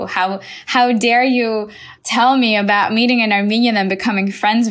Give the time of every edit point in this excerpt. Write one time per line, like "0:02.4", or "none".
none